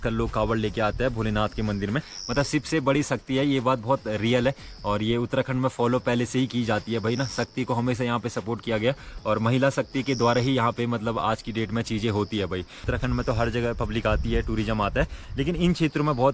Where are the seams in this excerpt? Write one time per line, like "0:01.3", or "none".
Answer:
0:02.2
0:12.9